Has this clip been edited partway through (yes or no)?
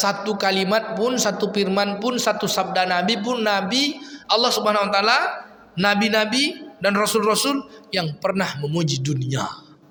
no